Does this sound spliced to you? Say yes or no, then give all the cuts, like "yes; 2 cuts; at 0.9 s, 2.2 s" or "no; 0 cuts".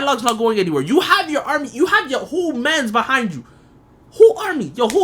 no; 0 cuts